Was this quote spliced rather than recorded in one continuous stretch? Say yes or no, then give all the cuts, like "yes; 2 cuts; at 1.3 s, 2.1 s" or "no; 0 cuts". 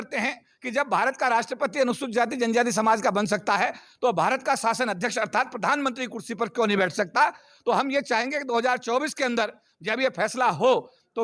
no; 0 cuts